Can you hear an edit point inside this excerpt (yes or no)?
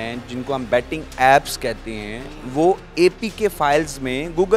no